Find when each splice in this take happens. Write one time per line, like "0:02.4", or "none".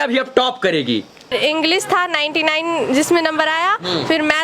0:01.3